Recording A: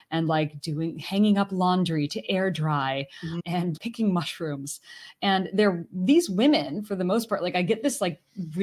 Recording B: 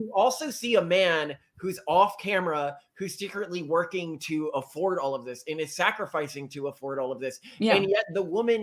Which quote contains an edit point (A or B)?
A